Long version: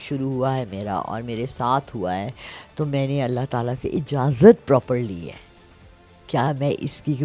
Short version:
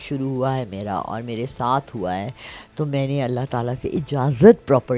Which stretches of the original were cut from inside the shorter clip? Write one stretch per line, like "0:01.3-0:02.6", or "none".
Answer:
none